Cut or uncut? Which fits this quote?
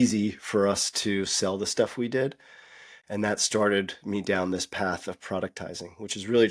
uncut